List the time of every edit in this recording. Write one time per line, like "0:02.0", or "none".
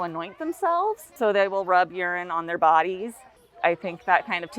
0:01.1